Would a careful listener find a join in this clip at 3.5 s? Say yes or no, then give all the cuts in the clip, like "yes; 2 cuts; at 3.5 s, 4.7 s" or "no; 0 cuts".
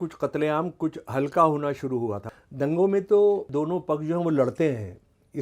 yes; 2 cuts; at 2.3 s, 3.5 s